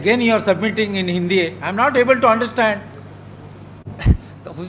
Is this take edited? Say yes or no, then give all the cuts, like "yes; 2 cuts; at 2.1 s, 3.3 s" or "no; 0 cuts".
no; 0 cuts